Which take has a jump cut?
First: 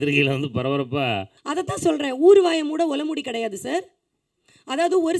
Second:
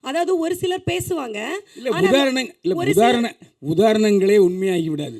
first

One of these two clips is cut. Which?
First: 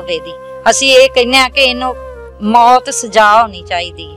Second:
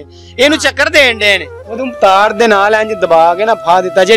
second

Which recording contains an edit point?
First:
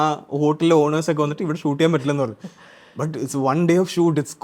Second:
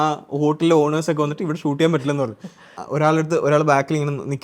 second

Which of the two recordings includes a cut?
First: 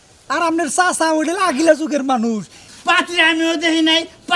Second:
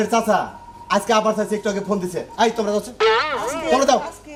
first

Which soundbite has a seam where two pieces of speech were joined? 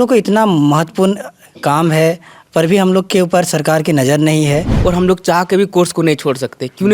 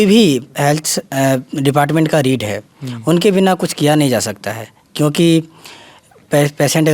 first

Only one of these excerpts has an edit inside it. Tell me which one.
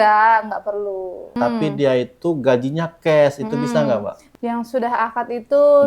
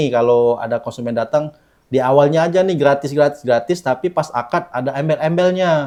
first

